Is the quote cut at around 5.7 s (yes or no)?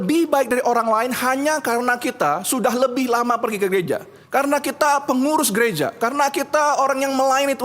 no